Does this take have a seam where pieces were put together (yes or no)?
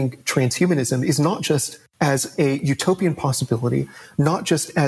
no